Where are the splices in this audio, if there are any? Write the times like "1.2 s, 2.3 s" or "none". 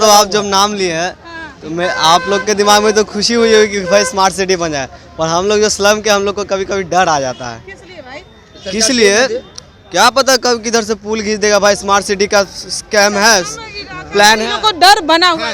none